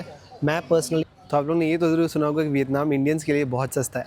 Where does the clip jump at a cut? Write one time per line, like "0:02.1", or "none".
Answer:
0:01.0